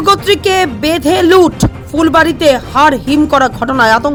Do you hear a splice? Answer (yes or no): no